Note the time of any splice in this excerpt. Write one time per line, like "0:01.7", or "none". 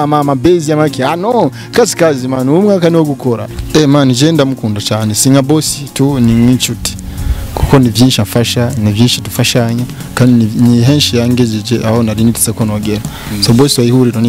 0:03.5